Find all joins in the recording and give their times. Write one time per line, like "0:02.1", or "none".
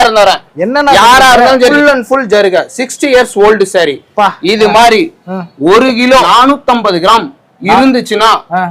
0:01.7
0:06.3